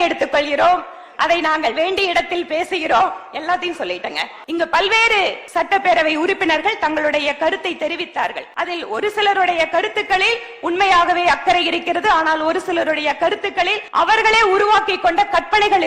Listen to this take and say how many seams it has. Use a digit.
4